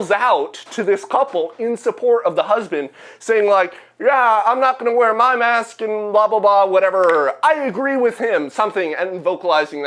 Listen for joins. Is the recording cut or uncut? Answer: uncut